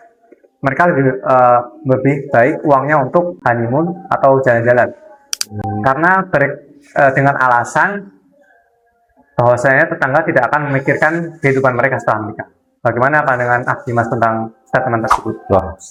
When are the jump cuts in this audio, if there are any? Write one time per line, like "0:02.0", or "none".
none